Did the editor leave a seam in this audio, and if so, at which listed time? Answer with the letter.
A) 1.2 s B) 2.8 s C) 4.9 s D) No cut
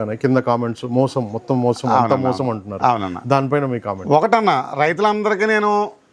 D